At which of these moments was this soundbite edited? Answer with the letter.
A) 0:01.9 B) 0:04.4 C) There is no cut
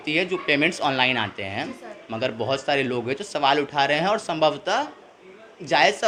C